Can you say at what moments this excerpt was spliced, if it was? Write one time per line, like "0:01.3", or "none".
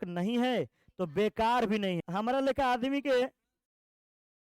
0:02.0